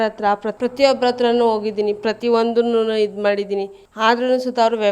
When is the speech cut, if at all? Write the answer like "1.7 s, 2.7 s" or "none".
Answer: 3.8 s